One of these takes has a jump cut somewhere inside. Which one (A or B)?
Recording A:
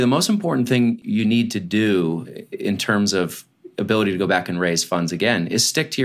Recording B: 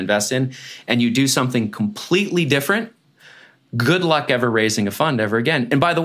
A